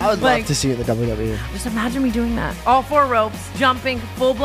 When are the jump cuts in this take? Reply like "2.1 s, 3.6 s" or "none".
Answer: 1.4 s, 2.5 s, 3.4 s